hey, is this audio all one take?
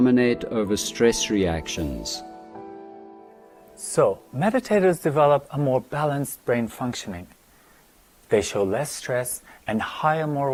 yes; 0 cuts

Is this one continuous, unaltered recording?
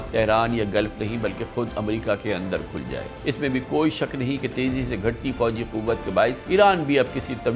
no; 2 cuts; at 3.1 s, 6.4 s

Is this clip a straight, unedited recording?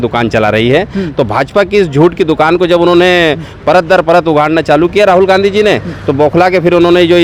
yes; 0 cuts

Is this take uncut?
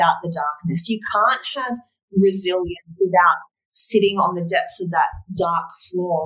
yes; 0 cuts

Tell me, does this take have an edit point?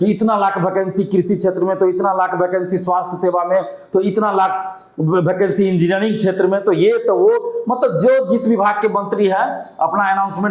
no; 0 cuts

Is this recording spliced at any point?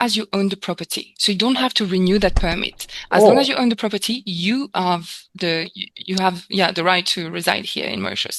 no; 0 cuts

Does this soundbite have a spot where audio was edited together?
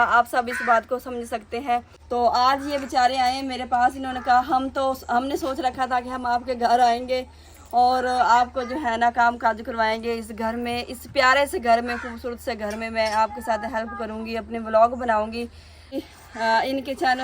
yes; 2 cuts; at 2.0 s, 15.9 s

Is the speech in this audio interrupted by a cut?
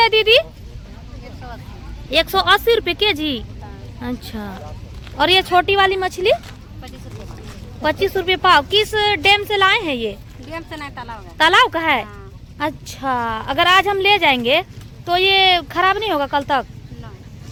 no; 0 cuts

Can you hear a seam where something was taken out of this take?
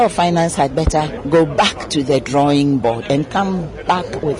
yes; 1 cut; at 1.2 s

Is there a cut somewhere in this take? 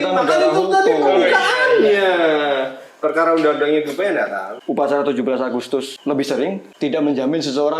yes; 3 cuts; at 4.5 s, 5.9 s, 6.7 s

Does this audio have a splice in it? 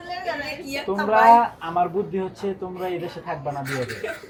no; 0 cuts

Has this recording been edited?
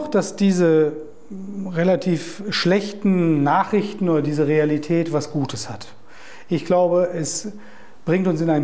no; 0 cuts

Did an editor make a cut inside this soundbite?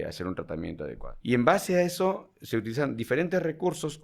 yes; 1 cut; at 1.1 s

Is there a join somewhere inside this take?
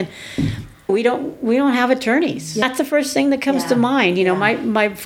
yes; 2 cuts; at 0.9 s, 2.6 s

